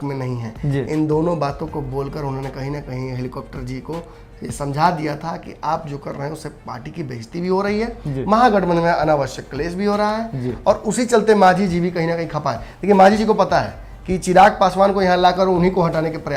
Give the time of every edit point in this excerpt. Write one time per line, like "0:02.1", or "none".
none